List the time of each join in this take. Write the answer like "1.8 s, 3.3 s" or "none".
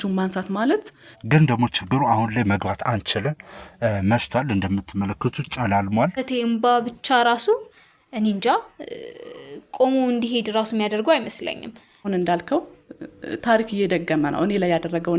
1.2 s, 6.2 s, 12.1 s